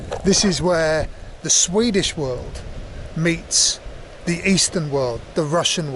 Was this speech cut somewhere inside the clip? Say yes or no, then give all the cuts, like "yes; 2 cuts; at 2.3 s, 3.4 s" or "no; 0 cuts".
no; 0 cuts